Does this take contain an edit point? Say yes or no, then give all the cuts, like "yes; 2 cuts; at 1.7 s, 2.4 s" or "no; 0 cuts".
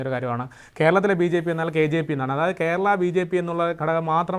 no; 0 cuts